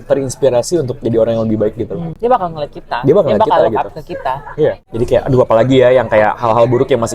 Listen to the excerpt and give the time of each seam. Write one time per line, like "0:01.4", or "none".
0:02.0
0:04.8